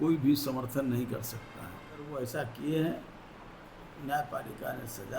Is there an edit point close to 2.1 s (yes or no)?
yes